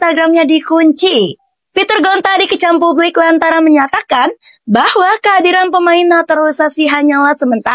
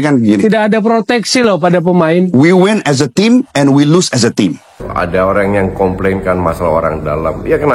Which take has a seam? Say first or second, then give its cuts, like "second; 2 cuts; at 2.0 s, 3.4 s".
second; 1 cut; at 4.9 s